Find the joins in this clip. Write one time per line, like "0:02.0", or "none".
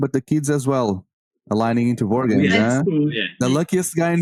none